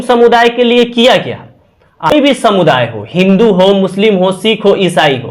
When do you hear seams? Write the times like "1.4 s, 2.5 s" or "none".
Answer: 2.1 s